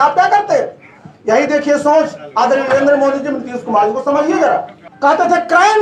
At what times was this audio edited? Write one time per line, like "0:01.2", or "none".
0:04.8